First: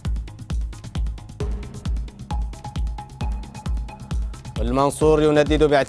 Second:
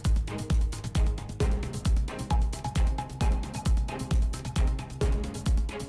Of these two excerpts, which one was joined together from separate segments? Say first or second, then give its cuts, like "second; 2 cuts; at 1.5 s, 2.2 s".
second; 1 cut; at 4.5 s